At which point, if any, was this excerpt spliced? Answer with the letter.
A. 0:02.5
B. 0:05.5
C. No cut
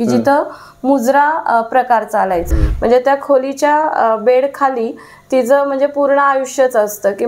A